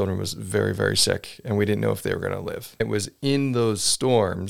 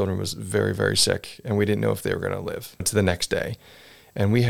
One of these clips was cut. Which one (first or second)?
first